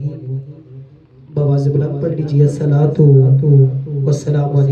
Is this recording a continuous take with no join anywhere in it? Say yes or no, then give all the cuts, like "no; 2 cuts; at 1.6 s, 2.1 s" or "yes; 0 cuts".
yes; 0 cuts